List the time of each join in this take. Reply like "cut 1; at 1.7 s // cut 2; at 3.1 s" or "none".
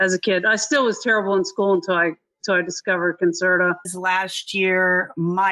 cut 1; at 3.9 s